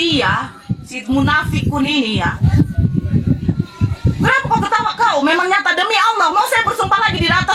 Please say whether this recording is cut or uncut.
cut